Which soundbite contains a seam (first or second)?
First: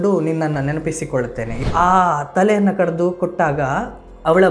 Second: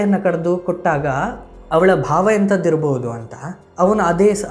first